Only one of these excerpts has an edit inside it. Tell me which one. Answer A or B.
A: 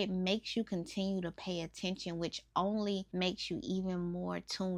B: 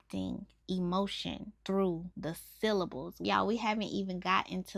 B